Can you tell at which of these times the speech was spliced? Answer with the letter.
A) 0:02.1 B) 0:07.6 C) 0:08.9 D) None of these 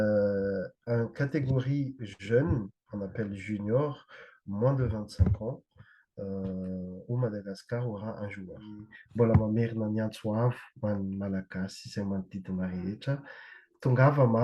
C